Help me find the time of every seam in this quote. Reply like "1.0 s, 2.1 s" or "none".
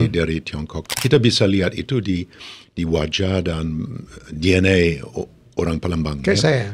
0.9 s

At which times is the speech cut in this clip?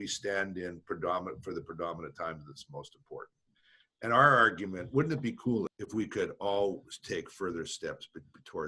5.7 s

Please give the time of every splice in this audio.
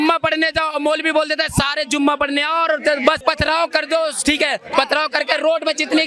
3.2 s

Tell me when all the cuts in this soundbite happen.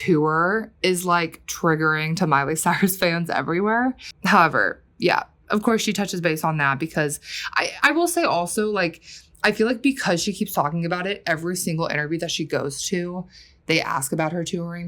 none

